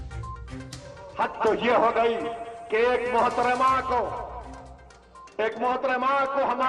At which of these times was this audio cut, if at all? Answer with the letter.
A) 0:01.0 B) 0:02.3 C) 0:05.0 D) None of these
A